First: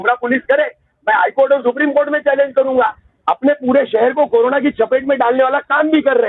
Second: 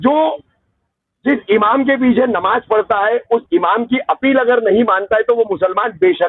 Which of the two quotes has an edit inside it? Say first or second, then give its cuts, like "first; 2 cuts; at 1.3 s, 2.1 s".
first; 1 cut; at 3.1 s